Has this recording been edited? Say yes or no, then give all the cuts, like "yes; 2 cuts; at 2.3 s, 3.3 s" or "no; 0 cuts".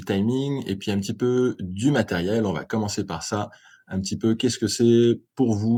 no; 0 cuts